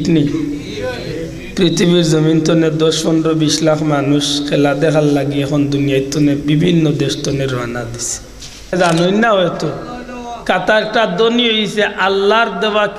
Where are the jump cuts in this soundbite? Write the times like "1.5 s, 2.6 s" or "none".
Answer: 8.7 s